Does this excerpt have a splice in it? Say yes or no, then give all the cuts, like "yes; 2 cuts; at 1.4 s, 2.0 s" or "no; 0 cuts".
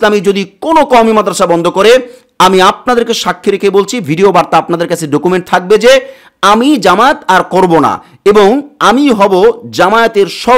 no; 0 cuts